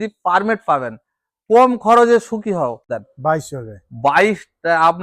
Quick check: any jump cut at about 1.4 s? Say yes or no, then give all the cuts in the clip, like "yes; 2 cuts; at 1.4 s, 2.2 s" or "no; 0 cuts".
no; 1 cut; at 3.0 s